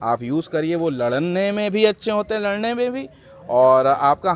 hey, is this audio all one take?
yes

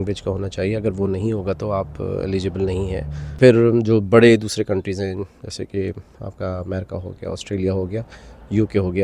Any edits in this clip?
yes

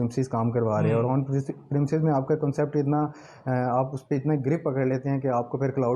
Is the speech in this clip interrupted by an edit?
no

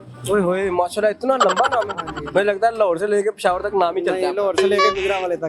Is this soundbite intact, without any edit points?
yes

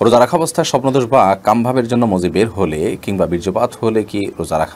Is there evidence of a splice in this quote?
no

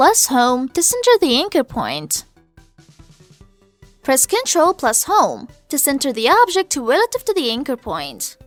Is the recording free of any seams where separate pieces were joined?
yes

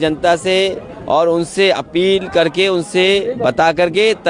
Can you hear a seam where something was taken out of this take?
no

